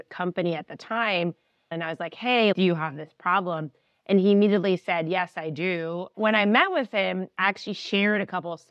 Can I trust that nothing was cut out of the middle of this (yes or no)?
no